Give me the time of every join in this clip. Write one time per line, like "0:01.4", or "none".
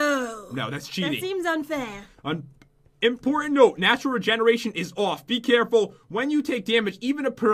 none